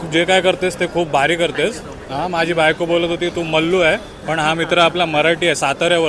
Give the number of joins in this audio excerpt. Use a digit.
0